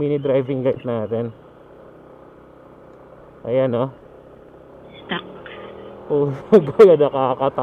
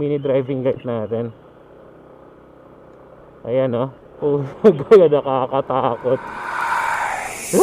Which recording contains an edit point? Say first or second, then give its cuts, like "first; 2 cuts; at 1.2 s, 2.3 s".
second; 1 cut; at 4.0 s